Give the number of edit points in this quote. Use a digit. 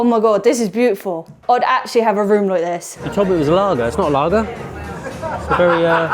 1